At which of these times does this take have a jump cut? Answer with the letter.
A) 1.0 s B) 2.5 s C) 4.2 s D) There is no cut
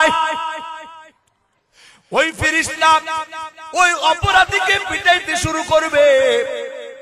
D